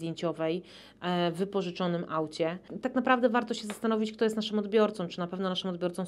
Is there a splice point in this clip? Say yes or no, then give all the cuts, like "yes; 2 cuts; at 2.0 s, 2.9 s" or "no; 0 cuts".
yes; 1 cut; at 2.7 s